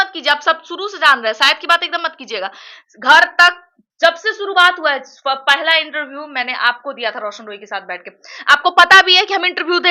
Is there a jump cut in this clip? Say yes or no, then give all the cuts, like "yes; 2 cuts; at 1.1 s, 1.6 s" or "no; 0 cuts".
no; 0 cuts